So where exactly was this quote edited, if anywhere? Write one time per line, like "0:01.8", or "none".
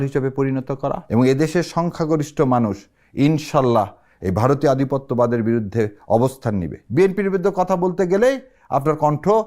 0:01.0
0:06.8